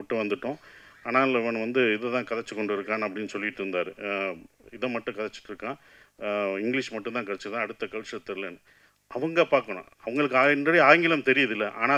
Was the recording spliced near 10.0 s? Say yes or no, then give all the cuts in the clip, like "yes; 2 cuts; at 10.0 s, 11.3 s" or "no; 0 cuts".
no; 0 cuts